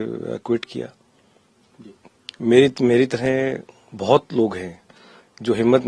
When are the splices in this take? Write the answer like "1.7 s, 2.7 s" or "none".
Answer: none